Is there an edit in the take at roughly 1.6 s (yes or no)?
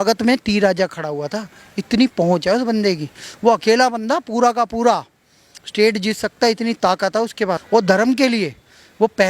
no